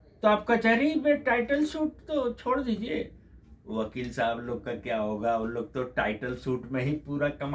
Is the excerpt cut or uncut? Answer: uncut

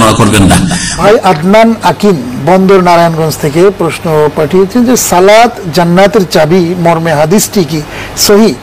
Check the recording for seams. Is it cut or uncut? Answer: cut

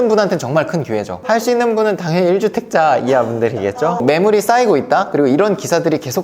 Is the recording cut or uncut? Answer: cut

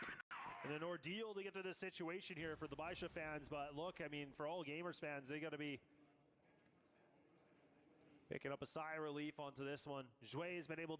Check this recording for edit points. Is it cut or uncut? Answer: cut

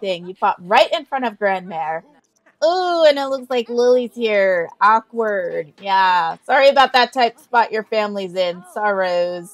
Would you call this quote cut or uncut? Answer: cut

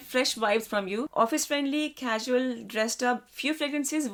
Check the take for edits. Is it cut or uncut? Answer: uncut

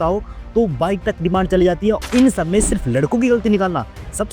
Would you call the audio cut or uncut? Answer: cut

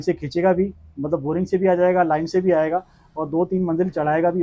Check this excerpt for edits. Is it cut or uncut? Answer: uncut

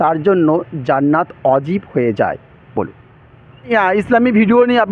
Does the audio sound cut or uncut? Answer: cut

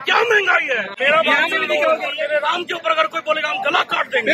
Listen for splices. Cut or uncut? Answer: cut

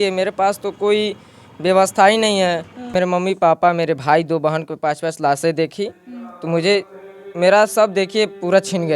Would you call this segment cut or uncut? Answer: cut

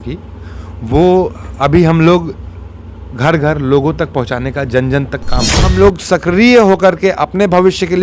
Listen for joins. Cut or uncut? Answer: cut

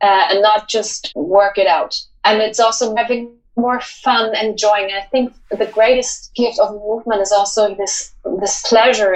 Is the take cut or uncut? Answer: cut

